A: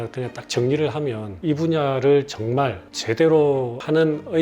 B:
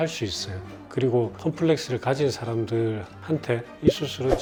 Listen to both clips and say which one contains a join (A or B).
A